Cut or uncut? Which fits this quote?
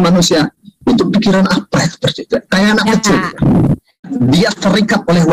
cut